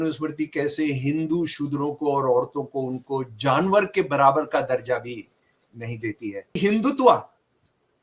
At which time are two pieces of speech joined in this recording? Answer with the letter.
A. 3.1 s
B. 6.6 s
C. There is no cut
B